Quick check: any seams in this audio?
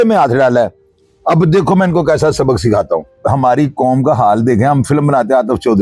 yes; 1 cut; at 3.1 s

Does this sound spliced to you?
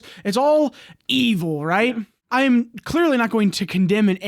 yes; 1 cut; at 2.2 s

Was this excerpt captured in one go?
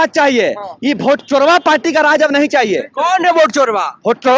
yes; 0 cuts

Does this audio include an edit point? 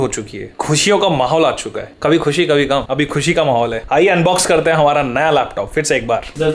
no; 0 cuts

